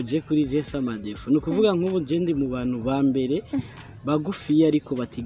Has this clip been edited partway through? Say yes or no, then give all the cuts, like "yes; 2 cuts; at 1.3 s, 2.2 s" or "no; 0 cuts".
no; 0 cuts